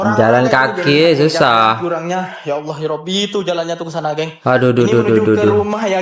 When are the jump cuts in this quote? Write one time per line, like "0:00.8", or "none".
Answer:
none